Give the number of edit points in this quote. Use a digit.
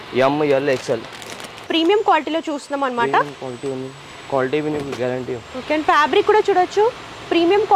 1